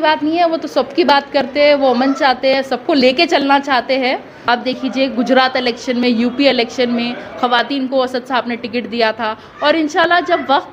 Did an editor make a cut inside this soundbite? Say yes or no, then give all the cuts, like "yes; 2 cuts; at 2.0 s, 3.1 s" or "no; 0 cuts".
yes; 1 cut; at 4.3 s